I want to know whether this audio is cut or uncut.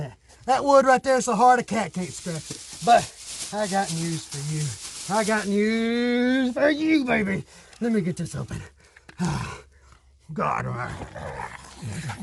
uncut